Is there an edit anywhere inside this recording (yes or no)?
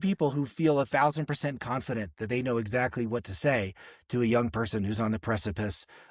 no